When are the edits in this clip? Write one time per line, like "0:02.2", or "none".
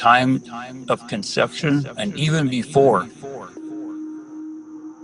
0:03.4